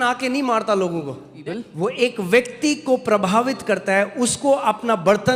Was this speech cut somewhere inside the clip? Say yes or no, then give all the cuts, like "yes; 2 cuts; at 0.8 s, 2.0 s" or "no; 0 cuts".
yes; 1 cut; at 1.3 s